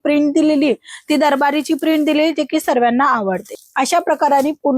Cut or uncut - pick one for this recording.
cut